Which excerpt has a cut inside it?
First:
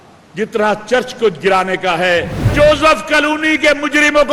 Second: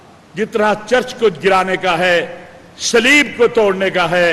first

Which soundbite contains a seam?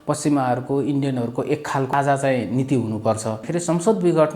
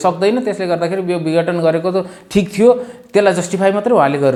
first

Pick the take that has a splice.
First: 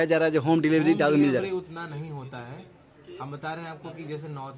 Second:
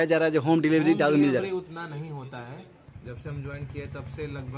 second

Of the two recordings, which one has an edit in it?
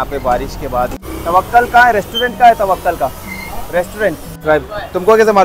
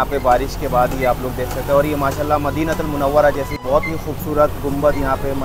first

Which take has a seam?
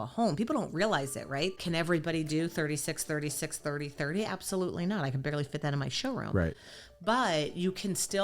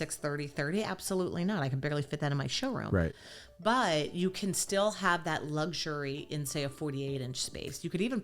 first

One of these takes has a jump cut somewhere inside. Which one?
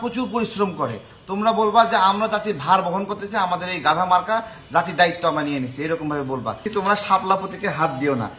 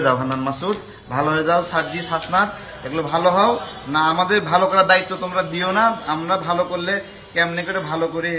first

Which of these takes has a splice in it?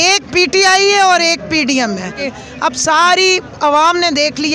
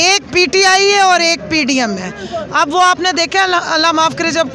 first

